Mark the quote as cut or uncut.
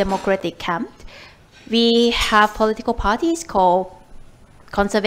uncut